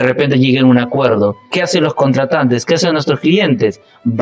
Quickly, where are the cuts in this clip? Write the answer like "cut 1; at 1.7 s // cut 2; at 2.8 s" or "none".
cut 1; at 1.5 s